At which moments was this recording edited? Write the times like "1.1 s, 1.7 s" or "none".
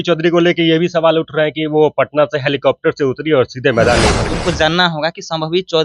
4.3 s